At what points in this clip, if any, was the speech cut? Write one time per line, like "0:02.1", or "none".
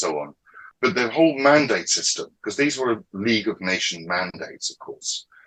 none